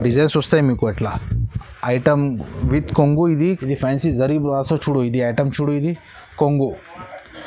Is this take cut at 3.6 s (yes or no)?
yes